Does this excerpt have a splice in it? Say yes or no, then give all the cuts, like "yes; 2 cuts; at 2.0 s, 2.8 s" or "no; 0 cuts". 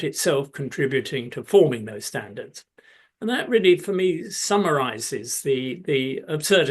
no; 0 cuts